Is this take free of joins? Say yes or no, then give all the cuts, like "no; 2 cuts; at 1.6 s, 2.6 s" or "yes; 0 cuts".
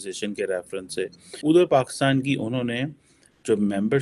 no; 1 cut; at 1.3 s